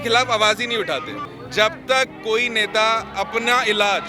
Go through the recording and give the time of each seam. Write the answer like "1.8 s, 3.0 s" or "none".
1.3 s